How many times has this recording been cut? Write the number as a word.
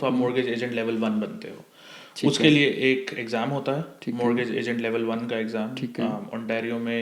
zero